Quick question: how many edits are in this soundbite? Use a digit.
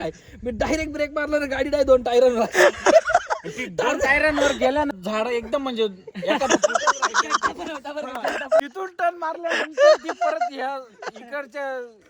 2